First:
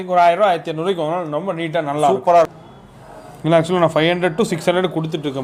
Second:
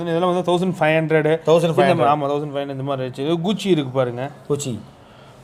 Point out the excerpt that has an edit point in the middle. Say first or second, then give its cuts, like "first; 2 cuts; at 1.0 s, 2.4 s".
first; 1 cut; at 2.5 s